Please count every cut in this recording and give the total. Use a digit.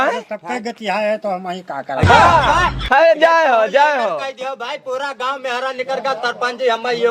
0